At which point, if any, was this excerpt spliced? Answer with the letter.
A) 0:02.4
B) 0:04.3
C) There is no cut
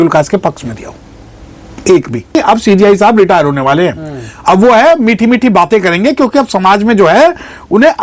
A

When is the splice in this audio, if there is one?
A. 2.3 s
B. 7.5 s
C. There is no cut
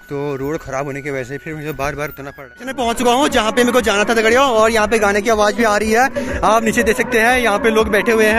A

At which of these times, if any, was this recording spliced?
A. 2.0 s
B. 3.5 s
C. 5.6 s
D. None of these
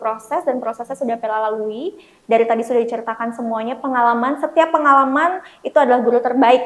D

